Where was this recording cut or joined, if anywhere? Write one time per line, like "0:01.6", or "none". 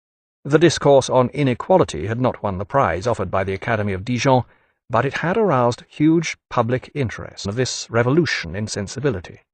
none